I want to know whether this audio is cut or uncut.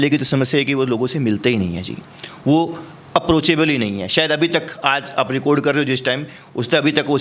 uncut